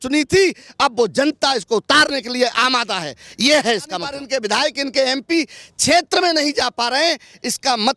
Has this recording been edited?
yes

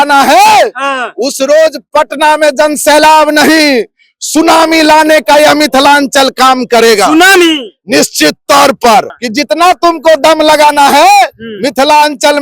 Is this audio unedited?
no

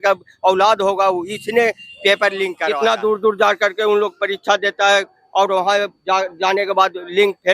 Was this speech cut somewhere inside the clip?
yes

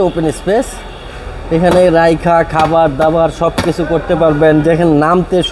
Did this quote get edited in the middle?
no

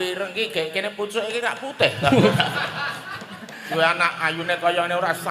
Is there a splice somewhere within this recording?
yes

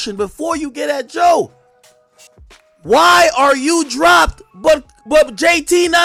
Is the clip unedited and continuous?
yes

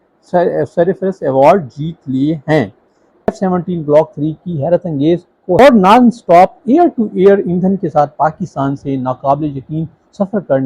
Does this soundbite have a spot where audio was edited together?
yes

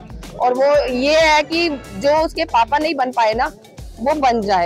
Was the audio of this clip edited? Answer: no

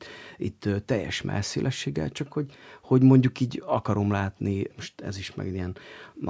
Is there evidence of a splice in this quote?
yes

